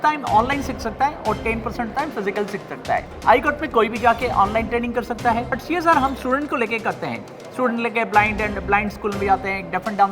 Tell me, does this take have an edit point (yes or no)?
yes